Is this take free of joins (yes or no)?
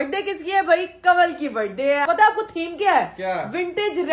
no